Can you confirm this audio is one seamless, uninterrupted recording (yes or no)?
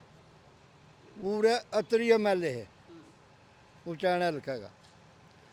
yes